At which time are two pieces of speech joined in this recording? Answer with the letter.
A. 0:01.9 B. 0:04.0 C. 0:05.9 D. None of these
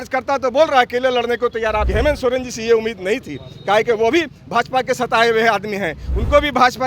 A